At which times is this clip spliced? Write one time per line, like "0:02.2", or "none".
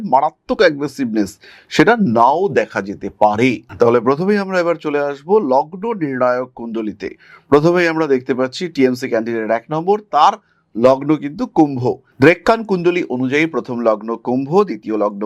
none